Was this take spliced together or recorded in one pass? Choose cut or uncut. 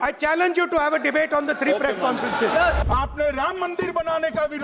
cut